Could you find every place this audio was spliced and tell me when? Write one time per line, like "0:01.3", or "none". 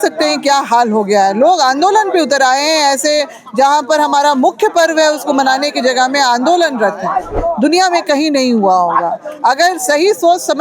0:07.4